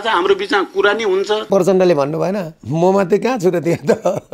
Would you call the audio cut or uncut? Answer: cut